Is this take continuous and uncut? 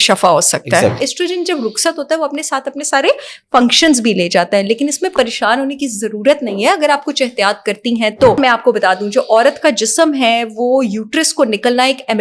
no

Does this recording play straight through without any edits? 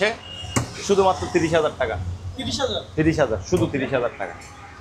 yes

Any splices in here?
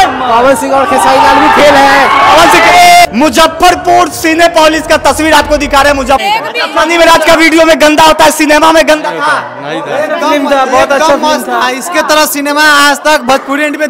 yes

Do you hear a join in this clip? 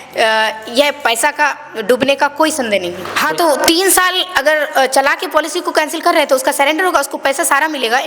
yes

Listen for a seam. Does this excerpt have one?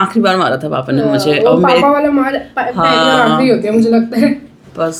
no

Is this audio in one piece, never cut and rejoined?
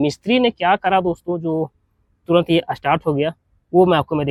yes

